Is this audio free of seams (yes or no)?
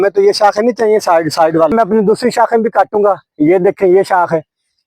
no